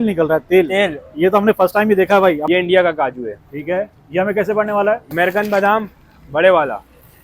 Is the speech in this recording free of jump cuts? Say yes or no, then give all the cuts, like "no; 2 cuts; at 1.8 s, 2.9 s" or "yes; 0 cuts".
no; 2 cuts; at 2.4 s, 5.1 s